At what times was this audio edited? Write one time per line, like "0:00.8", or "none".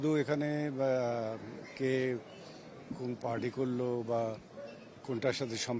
none

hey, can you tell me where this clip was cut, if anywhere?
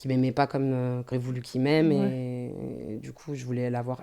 0:01.1

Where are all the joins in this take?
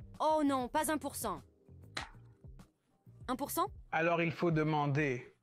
0:03.8

